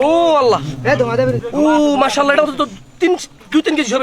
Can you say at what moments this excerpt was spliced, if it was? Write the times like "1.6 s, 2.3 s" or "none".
1.4 s